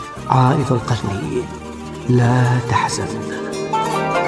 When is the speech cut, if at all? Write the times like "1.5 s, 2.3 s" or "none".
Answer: 3.0 s